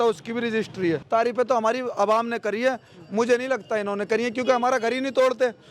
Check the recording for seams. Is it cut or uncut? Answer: cut